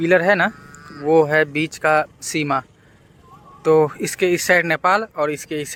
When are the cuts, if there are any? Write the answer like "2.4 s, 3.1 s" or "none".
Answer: none